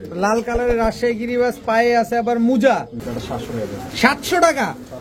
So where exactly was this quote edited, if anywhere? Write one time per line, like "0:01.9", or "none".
0:03.1